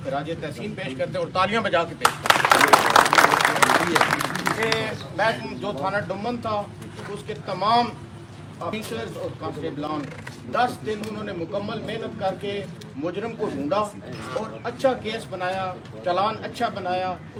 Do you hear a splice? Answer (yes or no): no